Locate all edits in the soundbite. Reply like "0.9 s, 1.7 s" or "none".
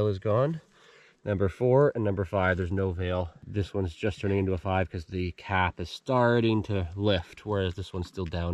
3.4 s